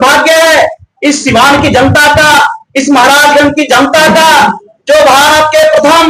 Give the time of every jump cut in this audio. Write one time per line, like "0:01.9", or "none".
none